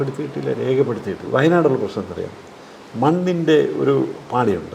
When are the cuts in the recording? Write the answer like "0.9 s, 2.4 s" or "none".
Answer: 1.3 s